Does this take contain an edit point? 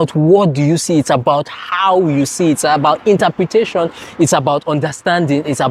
no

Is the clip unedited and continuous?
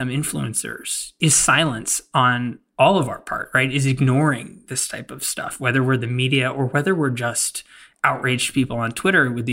yes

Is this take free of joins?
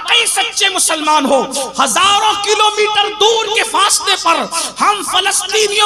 yes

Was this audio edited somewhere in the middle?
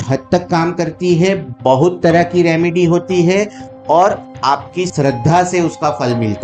yes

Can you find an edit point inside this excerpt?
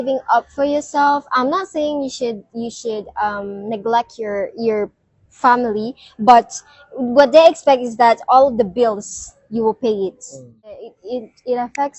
yes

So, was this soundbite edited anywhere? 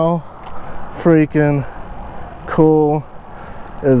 no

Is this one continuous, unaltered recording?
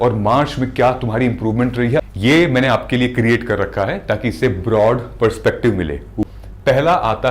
no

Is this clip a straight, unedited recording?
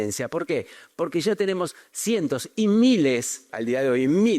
no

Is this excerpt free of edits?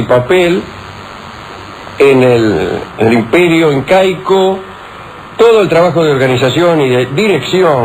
yes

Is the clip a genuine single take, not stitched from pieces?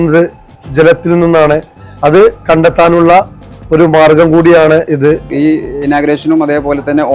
no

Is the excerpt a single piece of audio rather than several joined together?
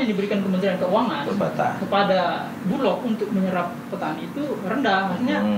yes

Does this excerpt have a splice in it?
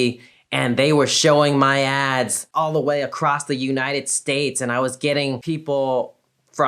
no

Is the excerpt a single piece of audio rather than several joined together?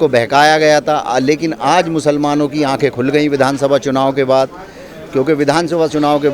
yes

